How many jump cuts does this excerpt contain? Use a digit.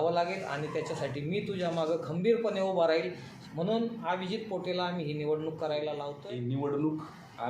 2